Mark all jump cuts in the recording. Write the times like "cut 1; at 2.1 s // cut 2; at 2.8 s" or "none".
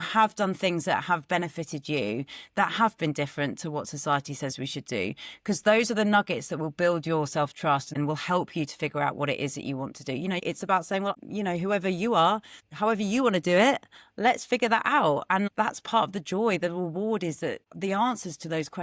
cut 1; at 8.0 s // cut 2; at 10.4 s